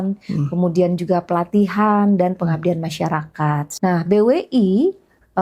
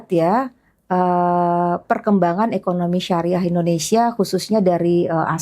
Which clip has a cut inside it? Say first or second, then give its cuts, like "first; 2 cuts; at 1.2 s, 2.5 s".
first; 1 cut; at 3.7 s